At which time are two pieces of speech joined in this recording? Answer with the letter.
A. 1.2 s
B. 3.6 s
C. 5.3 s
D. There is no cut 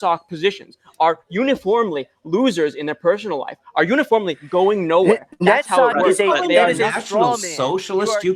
D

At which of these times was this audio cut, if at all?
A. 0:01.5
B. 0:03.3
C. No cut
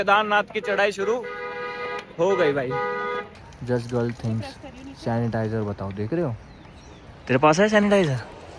B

